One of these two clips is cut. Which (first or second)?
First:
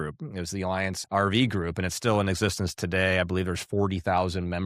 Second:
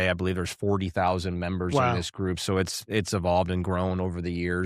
first